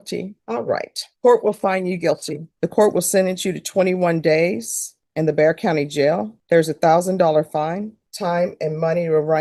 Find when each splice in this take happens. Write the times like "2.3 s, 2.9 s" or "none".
none

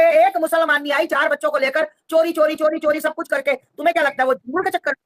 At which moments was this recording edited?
none

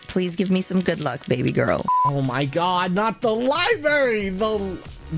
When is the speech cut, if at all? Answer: 2.0 s

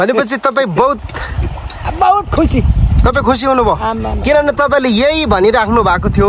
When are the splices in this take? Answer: none

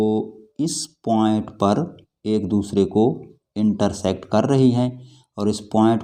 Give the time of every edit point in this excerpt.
none

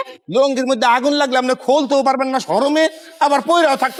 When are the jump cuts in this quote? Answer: none

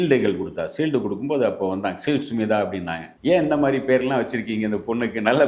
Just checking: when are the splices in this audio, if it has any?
3.1 s

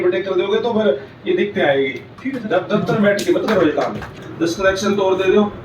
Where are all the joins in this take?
2.1 s, 4.1 s

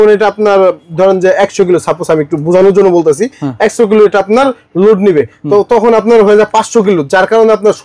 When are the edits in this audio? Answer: none

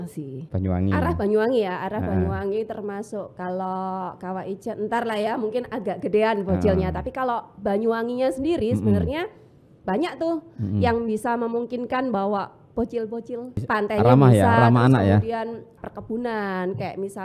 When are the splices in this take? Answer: 13.6 s, 15.7 s

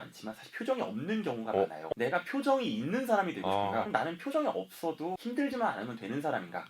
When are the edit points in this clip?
1.9 s, 3.9 s, 5.2 s

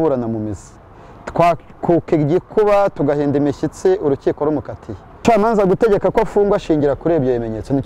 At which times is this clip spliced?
5.1 s

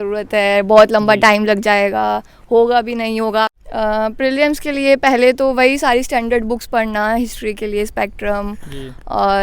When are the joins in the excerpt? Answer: 3.5 s

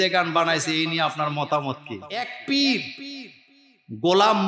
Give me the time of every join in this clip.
2.3 s

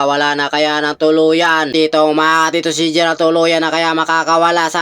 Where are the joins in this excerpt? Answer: 1.7 s

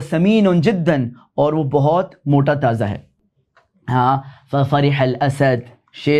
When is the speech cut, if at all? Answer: none

